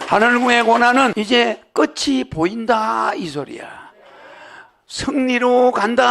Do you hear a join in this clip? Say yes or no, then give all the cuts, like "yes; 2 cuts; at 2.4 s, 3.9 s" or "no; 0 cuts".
yes; 1 cut; at 1.1 s